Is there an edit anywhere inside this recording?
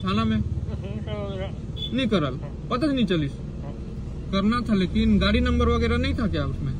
no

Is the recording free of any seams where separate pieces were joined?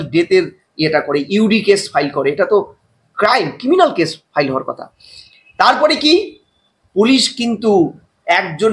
yes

